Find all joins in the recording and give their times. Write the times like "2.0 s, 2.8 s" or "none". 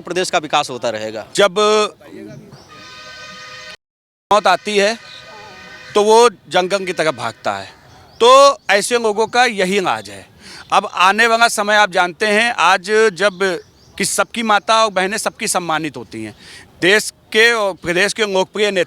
1.2 s